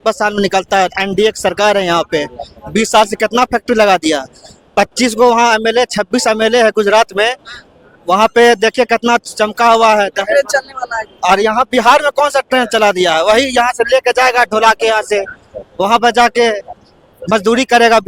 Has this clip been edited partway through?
no; 0 cuts

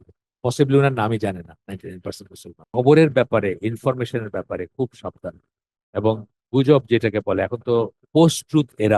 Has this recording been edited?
yes; 1 cut; at 2.7 s

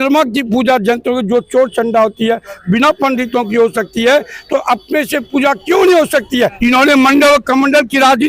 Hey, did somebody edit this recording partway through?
yes; 1 cut; at 6.3 s

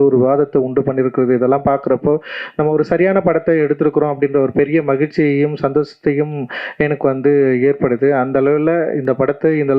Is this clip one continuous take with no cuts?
yes; 0 cuts

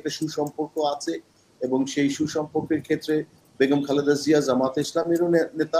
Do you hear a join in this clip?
no; 0 cuts

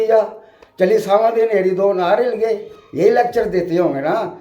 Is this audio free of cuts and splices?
yes; 0 cuts

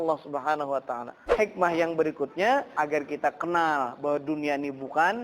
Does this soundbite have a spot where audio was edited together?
yes; 1 cut; at 1.3 s

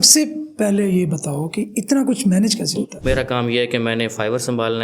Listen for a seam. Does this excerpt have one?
yes; 1 cut; at 3.0 s

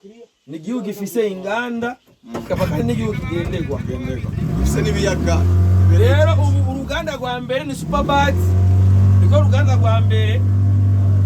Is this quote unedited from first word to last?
yes; 0 cuts

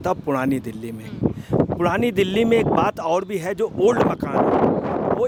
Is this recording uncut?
yes; 0 cuts

